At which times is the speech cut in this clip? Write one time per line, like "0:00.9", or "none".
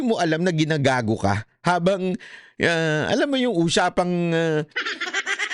none